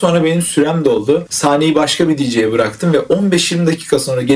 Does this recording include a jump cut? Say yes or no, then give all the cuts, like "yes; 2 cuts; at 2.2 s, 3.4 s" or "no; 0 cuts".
yes; 1 cut; at 1.3 s